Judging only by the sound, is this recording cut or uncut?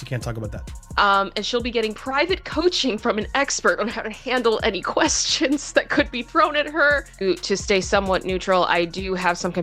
cut